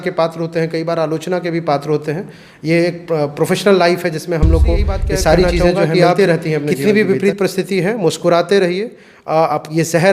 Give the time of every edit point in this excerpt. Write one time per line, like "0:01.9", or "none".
0:06.7

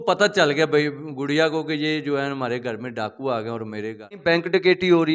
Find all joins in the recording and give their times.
0:04.2

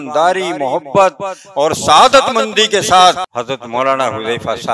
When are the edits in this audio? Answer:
0:03.2

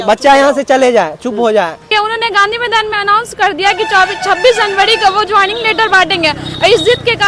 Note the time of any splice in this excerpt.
0:01.9

